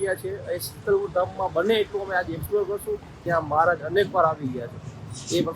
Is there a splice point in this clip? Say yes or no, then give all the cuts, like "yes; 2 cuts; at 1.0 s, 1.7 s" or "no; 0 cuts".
yes; 1 cut; at 3.2 s